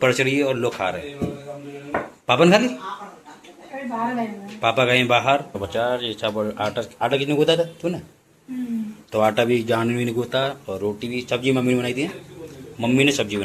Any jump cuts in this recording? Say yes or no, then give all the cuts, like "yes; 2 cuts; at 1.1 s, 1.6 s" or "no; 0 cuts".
yes; 1 cut; at 5.6 s